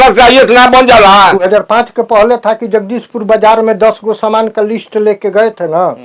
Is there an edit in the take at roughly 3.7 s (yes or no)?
no